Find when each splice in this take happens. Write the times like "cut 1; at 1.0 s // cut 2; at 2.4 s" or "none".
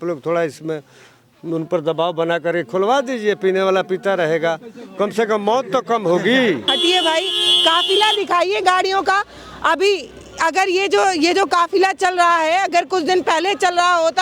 cut 1; at 6.7 s